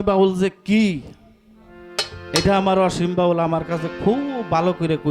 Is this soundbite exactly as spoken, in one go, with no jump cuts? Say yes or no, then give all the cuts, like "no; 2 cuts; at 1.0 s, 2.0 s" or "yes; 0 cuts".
yes; 0 cuts